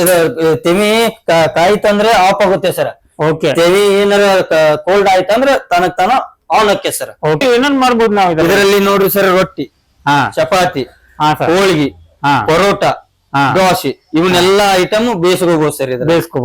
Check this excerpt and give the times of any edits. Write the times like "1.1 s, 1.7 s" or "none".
7.4 s